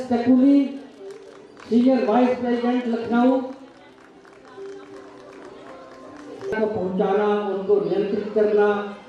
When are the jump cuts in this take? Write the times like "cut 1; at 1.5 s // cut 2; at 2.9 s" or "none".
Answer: cut 1; at 6.5 s